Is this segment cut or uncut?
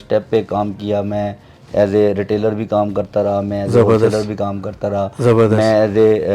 uncut